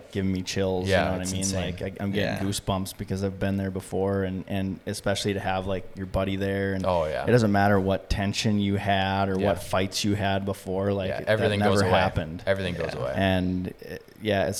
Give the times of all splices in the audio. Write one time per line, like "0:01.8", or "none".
none